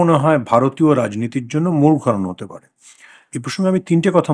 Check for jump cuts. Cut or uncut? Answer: uncut